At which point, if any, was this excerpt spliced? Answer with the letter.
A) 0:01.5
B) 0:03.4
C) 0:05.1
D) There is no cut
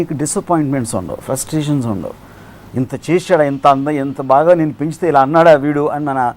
D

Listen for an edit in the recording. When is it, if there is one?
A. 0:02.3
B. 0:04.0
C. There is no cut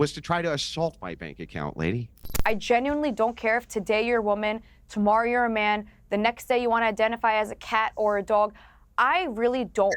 A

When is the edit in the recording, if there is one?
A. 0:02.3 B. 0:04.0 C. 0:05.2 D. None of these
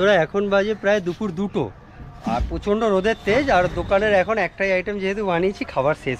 D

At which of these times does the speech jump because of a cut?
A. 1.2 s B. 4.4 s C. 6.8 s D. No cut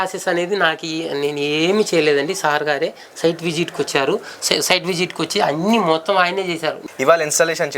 C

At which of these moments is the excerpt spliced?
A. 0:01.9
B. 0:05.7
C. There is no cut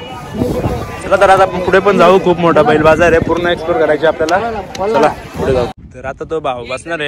B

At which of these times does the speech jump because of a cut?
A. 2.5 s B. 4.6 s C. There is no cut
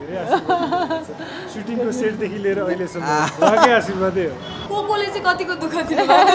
B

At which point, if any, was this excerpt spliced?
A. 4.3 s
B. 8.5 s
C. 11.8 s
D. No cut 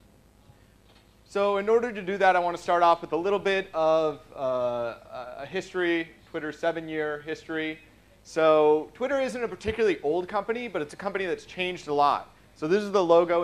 C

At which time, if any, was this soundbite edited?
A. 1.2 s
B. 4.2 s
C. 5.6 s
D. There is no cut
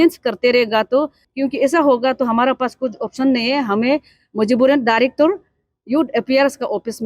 A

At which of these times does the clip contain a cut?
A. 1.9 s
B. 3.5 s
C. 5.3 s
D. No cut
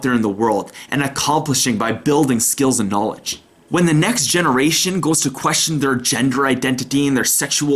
B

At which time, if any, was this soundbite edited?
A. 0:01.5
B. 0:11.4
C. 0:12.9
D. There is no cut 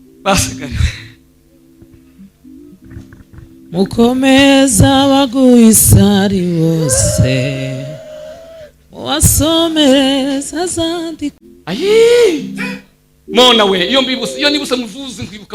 B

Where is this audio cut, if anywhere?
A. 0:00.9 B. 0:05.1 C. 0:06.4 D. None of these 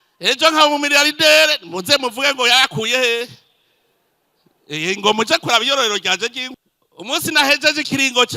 C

